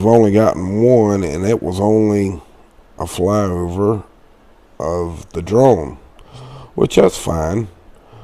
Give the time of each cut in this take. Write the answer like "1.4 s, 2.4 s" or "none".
1.3 s